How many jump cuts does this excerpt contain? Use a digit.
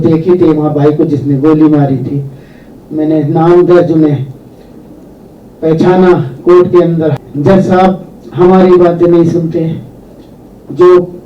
1